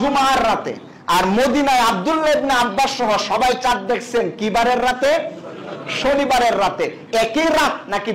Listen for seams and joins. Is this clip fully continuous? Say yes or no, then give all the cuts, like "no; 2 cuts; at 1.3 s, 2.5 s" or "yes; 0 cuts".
yes; 0 cuts